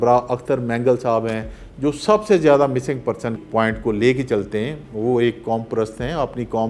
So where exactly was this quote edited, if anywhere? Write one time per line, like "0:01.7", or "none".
0:03.4